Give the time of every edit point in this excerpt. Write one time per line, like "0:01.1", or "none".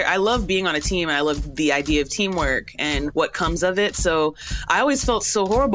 0:03.1